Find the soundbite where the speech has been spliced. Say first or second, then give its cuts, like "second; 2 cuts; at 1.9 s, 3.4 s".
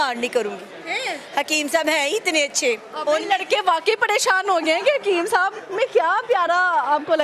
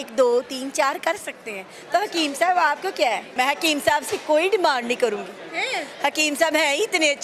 second; 1 cut; at 3.2 s